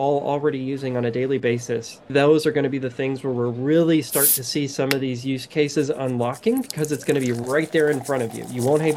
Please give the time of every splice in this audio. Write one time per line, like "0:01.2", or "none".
0:02.1